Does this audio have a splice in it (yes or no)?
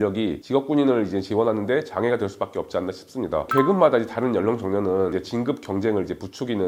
yes